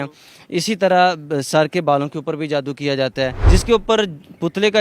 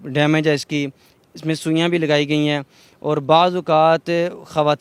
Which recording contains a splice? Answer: first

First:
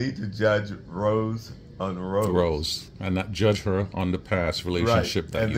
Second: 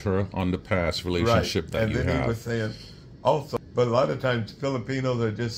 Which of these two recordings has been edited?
second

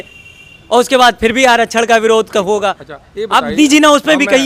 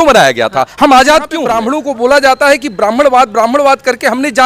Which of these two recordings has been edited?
second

